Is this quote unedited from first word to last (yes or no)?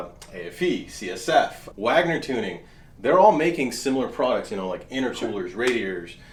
yes